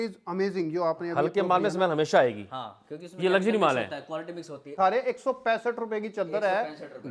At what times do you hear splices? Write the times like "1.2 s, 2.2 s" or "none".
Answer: 4.7 s

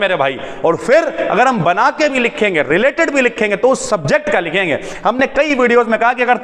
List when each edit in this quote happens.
none

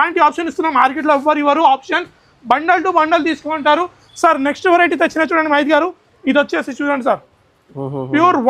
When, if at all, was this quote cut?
none

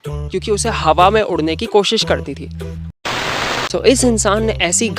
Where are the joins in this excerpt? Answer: 3.1 s

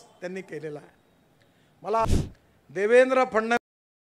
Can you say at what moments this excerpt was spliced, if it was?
2.1 s

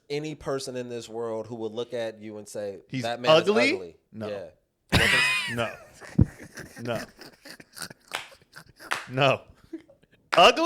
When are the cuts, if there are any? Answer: none

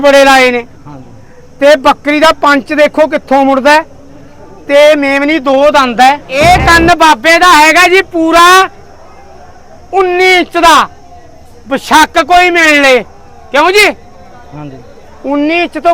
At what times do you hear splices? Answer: 6.3 s

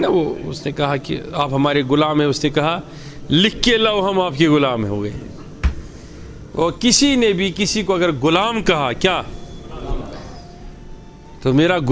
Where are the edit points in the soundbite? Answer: none

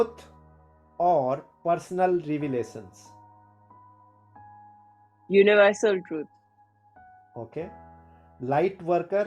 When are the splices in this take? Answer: 3.4 s, 5.2 s

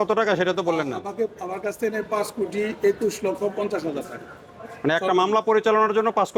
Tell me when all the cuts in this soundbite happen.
none

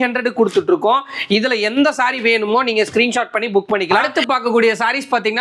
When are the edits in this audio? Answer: 4.0 s

